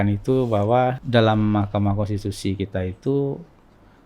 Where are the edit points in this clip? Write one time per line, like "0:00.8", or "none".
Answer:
0:01.0